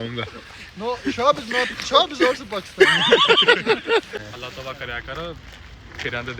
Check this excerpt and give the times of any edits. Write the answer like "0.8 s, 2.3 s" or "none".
4.2 s